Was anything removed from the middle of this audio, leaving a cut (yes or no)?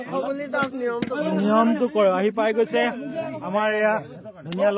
no